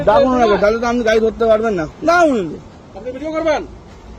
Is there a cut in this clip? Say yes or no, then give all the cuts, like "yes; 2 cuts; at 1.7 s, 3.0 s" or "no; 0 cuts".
yes; 1 cut; at 1.9 s